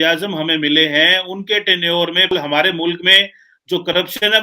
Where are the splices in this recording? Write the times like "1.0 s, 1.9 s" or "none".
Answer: 2.3 s